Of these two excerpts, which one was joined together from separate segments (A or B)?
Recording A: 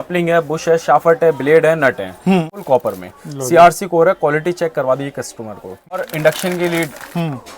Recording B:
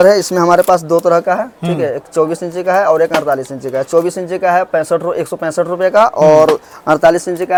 A